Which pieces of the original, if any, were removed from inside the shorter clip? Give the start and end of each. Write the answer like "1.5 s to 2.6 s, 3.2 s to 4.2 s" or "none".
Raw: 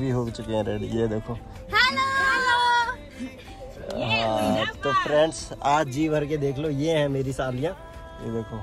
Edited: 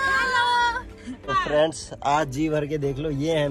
3.4 s to 4.8 s